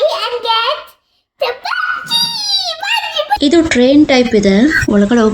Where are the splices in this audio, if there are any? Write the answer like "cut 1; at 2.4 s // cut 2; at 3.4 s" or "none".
cut 1; at 3.4 s